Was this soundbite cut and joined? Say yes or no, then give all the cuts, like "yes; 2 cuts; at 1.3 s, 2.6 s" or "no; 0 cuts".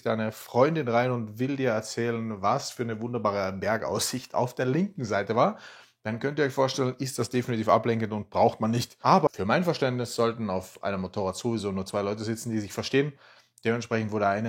no; 0 cuts